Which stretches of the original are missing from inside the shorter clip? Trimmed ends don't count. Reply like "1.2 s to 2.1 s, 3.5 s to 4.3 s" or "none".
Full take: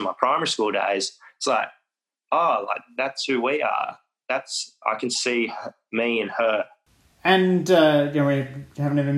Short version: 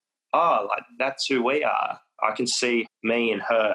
4.0 s to 4.7 s, 5.6 s to 5.8 s